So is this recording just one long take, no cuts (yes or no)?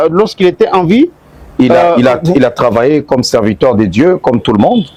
yes